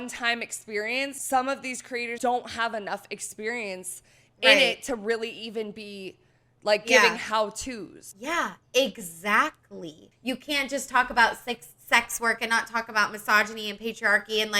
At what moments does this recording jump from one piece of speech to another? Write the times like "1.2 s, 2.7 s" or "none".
1.2 s, 2.1 s, 8.1 s, 10.0 s

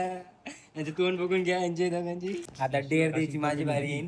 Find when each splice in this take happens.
2.5 s

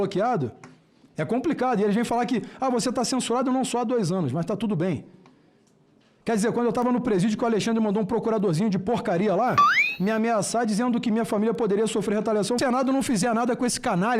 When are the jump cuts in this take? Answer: 12.6 s

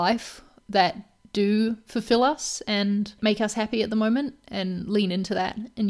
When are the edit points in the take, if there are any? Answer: 3.1 s

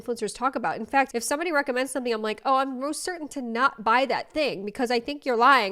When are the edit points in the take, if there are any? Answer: 1.1 s

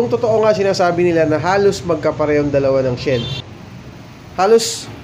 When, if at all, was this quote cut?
3.3 s

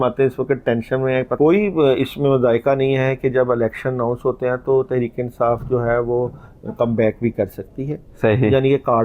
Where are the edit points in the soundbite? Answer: 1.3 s

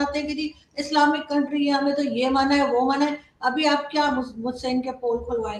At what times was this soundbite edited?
none

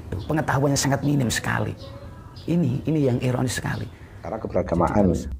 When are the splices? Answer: 4.4 s

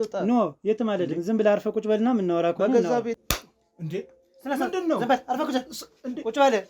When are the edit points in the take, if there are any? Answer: 3.2 s

